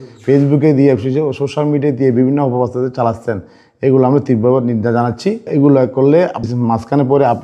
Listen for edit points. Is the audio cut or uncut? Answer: uncut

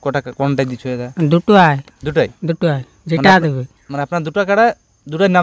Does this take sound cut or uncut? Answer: uncut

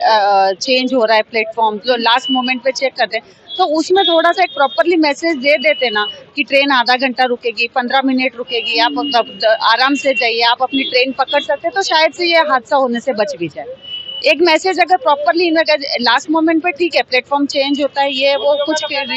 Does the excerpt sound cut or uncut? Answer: uncut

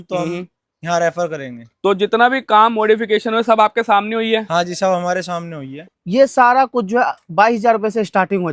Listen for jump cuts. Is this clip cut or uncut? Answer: cut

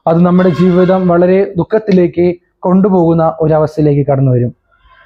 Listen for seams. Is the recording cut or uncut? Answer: uncut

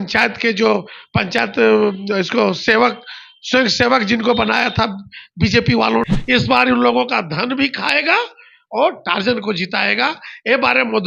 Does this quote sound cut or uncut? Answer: cut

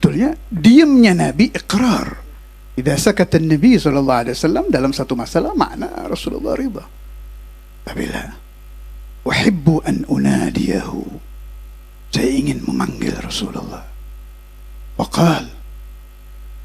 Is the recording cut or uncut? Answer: uncut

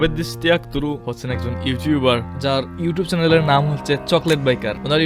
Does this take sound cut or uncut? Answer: cut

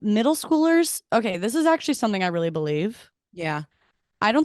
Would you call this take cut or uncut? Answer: uncut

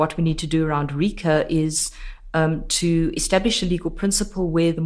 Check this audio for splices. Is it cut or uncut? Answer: uncut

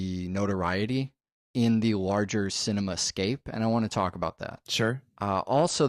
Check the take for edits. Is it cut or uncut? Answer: cut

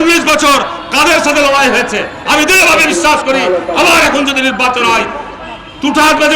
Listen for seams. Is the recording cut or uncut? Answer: cut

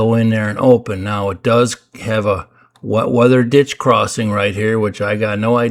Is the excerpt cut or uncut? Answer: uncut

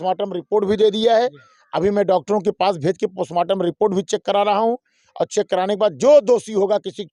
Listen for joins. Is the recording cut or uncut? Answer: uncut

